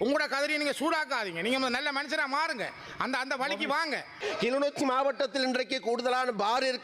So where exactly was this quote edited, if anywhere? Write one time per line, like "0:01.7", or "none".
0:04.2